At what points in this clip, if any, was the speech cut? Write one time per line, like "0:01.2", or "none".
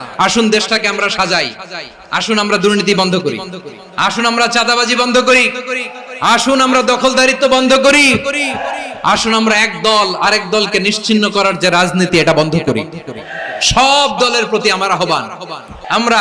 none